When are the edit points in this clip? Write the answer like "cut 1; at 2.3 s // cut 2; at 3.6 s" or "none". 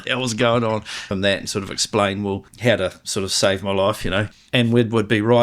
cut 1; at 1.1 s // cut 2; at 2.5 s // cut 3; at 4.3 s